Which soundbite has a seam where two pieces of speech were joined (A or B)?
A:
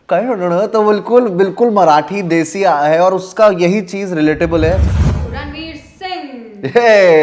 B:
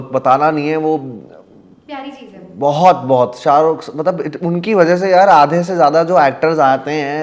A